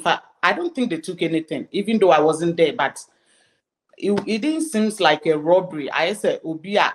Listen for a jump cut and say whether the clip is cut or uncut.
uncut